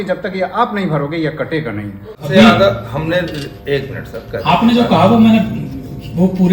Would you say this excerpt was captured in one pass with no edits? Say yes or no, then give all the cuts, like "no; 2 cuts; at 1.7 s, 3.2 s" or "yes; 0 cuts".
no; 1 cut; at 2.2 s